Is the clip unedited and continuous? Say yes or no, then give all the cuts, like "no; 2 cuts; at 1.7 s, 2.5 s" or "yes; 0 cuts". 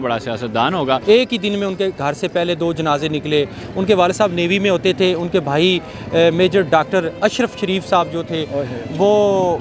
no; 1 cut; at 1.0 s